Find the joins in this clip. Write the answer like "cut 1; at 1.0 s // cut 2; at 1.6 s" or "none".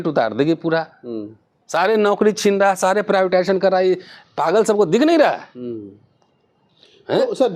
none